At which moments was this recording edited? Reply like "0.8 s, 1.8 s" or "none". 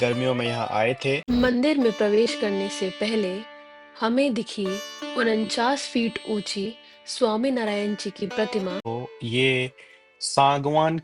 1.2 s, 8.8 s